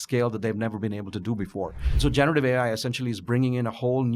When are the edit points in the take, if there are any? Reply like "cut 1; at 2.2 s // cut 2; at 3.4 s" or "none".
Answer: cut 1; at 1.9 s